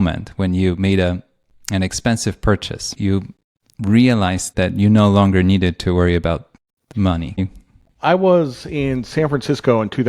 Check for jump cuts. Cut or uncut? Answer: cut